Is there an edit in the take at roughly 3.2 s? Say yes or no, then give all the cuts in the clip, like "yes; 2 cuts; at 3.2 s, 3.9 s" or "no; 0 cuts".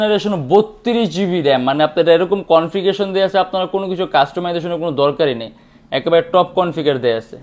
no; 0 cuts